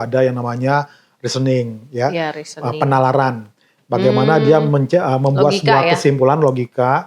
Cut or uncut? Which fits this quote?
uncut